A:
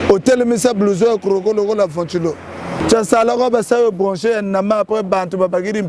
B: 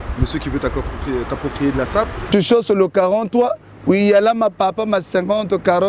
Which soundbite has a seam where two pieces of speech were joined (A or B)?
B